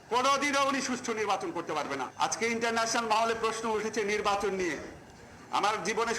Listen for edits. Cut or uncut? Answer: cut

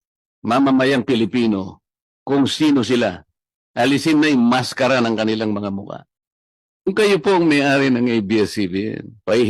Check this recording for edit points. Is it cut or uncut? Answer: cut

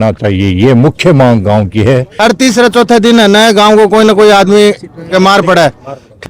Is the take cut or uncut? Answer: cut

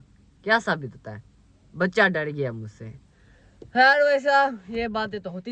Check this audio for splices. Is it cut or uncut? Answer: uncut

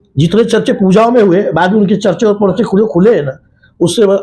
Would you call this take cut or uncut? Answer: uncut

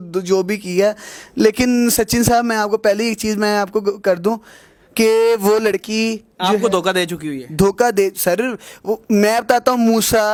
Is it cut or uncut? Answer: uncut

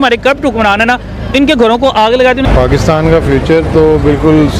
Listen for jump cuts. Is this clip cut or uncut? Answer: cut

